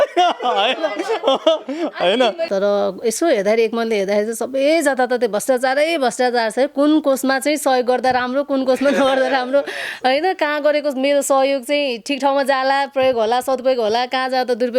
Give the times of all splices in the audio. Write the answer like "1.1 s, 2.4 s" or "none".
2.5 s